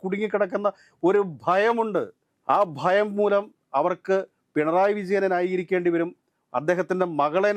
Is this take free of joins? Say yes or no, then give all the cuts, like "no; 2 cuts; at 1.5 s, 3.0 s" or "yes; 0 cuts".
yes; 0 cuts